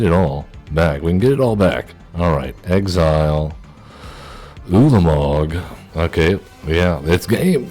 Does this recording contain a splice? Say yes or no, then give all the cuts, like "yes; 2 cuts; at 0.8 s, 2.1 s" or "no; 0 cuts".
yes; 2 cuts; at 2.0 s, 5.8 s